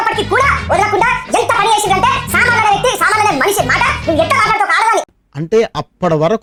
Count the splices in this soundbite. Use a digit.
0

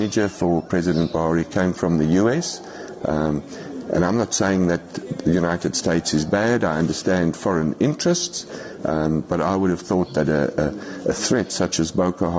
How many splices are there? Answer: 0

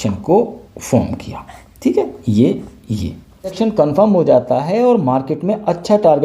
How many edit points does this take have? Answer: 1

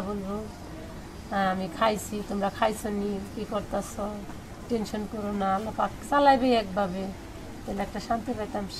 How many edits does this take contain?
0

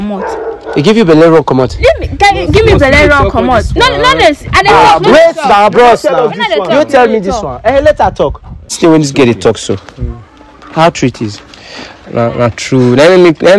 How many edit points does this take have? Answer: 1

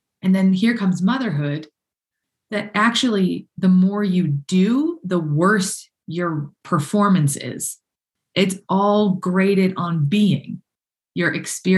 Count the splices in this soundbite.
0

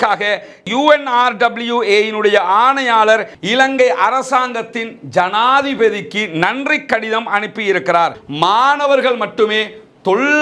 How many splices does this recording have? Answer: 2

